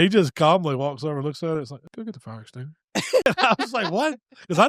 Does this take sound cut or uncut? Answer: cut